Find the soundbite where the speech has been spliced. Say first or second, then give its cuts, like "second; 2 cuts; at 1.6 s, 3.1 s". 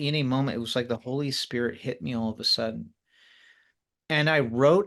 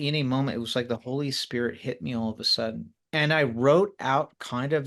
second; 1 cut; at 2.9 s